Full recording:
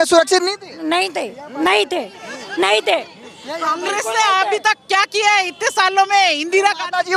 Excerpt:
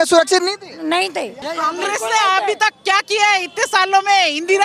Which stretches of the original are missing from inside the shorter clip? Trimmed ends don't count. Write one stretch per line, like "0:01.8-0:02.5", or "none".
0:01.4-0:03.4